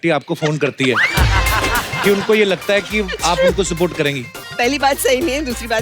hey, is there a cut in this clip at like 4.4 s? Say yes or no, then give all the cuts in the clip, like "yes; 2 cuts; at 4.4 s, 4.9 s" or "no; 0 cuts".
yes; 1 cut; at 4.4 s